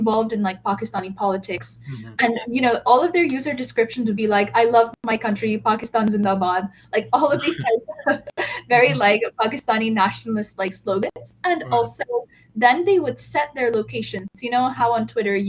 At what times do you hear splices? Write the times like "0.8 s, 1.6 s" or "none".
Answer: none